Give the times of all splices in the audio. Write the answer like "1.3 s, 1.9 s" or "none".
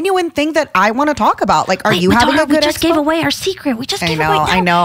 none